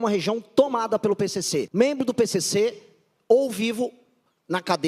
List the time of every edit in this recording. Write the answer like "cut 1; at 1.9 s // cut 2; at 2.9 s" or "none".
cut 1; at 1.7 s